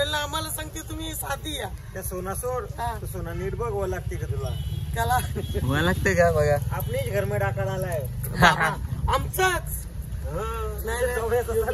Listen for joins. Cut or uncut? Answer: uncut